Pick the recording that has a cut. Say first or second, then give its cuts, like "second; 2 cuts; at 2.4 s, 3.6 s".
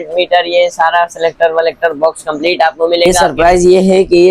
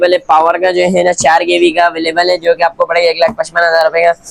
first; 1 cut; at 3.1 s